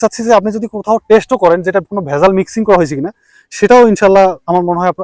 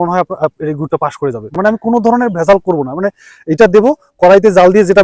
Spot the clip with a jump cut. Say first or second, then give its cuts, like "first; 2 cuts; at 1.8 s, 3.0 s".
second; 1 cut; at 1.5 s